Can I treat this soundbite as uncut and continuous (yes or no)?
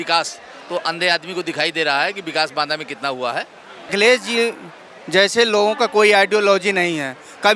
no